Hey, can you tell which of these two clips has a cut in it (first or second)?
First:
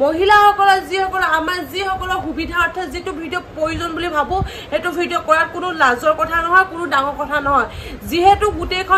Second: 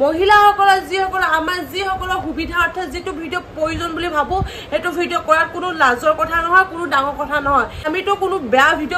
second